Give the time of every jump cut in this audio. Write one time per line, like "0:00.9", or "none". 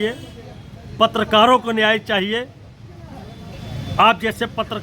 none